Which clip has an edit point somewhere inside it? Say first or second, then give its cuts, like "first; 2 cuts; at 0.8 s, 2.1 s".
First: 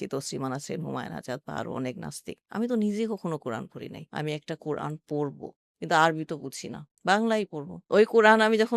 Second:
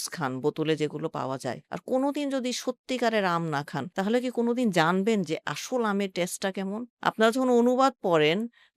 first; 2 cuts; at 4.0 s, 7.8 s